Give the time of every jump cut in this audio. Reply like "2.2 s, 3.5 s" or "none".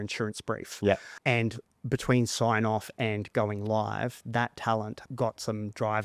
0.8 s, 5.0 s